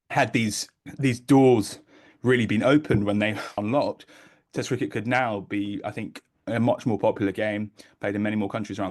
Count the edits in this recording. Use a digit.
1